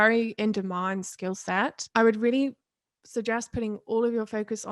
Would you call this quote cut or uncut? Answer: cut